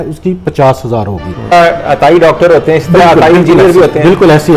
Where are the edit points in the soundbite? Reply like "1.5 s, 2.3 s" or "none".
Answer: 1.5 s